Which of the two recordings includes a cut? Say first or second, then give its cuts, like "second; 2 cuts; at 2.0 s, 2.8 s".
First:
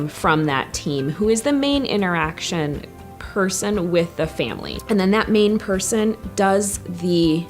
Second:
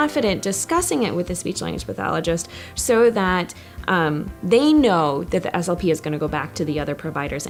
first; 1 cut; at 4.7 s